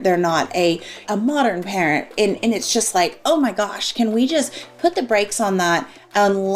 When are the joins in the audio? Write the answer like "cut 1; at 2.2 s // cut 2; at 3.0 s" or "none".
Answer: cut 1; at 1.1 s